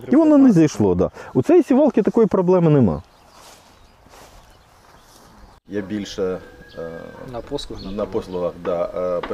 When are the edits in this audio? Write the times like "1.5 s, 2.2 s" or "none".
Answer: none

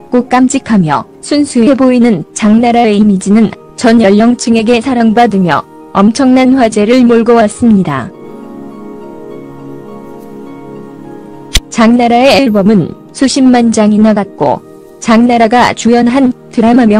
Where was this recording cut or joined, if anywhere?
9.4 s

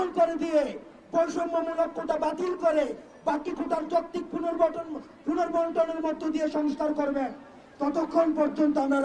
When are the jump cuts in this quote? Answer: none

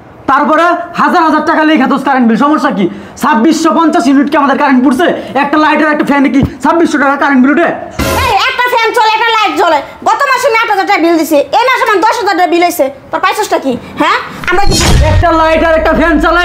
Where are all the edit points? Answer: 8.4 s, 14.7 s

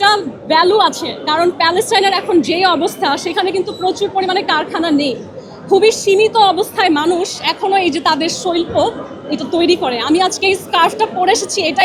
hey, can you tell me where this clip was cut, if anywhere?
none

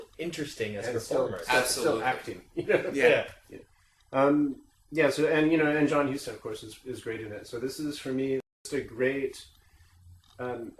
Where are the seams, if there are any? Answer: none

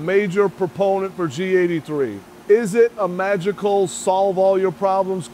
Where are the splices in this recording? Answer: 2.3 s

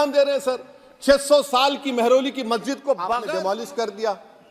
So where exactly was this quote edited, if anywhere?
3.2 s

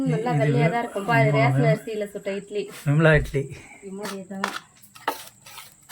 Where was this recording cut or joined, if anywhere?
4.1 s

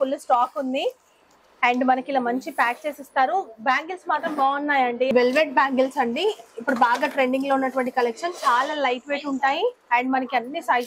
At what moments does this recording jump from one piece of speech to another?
5.1 s

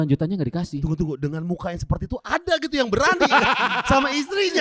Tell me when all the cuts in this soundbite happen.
0.9 s

